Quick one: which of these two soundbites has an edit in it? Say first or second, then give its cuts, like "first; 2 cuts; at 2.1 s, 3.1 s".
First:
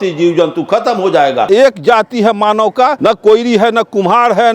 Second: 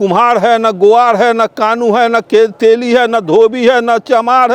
first; 2 cuts; at 1.5 s, 3.0 s